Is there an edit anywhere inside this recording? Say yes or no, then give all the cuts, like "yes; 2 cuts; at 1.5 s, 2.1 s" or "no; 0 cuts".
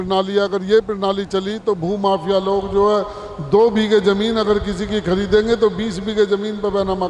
no; 0 cuts